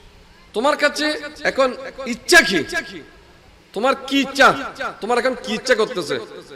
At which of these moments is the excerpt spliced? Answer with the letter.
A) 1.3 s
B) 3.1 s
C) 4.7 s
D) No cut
A